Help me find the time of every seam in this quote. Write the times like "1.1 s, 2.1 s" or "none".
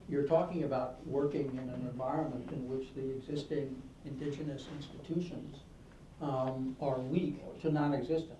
7.5 s